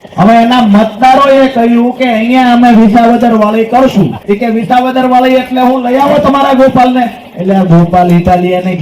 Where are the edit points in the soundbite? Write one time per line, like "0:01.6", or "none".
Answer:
0:04.2